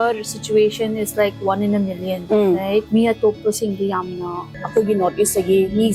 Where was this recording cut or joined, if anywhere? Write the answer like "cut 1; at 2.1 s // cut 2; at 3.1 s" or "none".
cut 1; at 2.1 s // cut 2; at 2.9 s // cut 3; at 4.5 s